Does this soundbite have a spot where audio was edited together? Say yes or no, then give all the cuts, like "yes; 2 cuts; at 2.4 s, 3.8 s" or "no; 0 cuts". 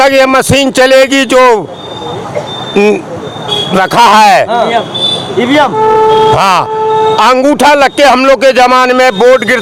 no; 0 cuts